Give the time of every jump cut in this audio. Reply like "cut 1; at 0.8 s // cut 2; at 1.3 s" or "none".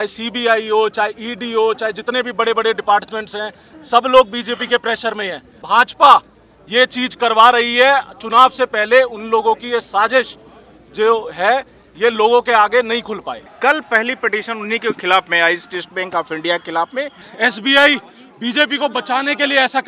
cut 1; at 5.6 s // cut 2; at 13.5 s // cut 3; at 17.2 s